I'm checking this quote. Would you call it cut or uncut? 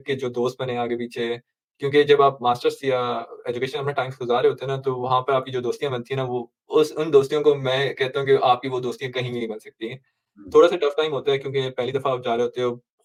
uncut